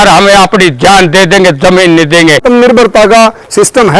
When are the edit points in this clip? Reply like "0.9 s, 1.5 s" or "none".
2.4 s

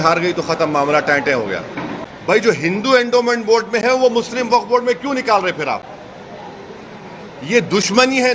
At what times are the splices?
2.0 s

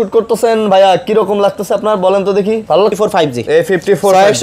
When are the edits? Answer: 2.9 s

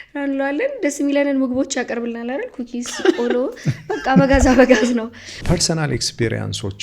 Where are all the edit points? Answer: 5.4 s

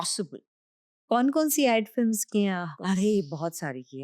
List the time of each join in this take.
1.0 s

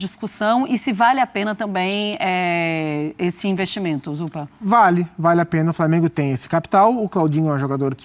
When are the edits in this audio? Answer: none

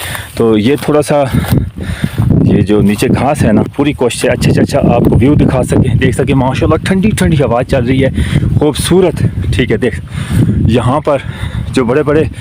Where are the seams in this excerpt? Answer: none

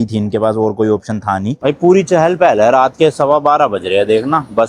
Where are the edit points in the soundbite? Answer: 1.6 s

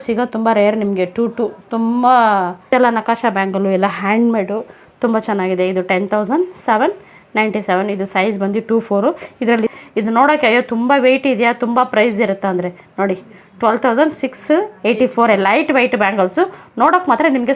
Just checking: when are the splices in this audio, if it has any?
2.7 s, 9.8 s

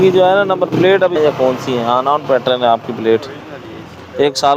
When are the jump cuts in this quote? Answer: none

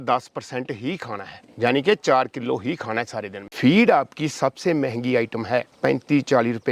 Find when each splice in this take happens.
3.4 s

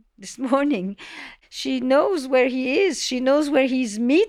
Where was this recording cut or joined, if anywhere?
1.3 s

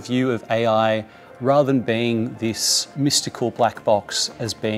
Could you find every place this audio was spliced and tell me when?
2.8 s

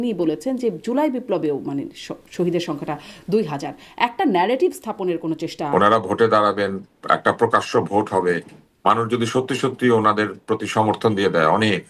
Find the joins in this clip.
5.6 s

